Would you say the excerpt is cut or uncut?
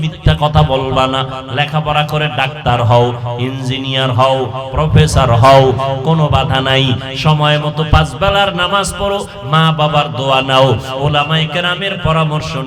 uncut